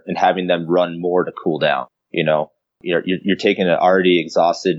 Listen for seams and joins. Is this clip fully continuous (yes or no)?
no